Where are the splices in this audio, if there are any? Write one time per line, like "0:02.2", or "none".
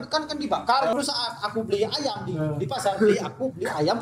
0:00.9